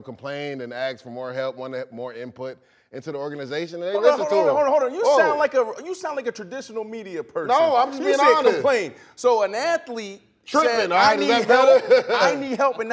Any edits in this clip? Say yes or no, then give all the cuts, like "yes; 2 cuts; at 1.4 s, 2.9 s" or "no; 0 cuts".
no; 0 cuts